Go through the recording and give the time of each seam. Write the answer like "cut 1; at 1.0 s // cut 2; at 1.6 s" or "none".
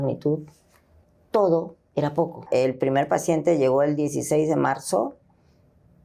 cut 1; at 2.5 s